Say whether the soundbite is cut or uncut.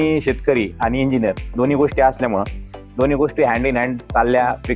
uncut